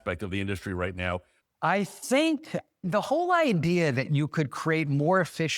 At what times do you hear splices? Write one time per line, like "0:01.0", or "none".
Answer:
0:01.3
0:02.8